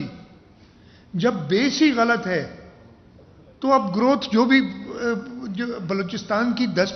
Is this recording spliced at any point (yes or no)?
no